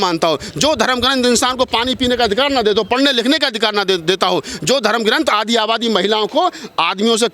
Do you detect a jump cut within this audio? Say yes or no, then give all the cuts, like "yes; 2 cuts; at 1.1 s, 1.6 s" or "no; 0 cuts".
no; 0 cuts